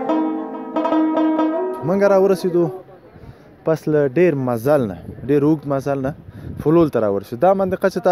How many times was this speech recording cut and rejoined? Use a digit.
1